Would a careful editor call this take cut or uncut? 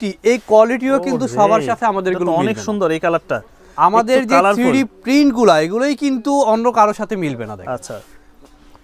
uncut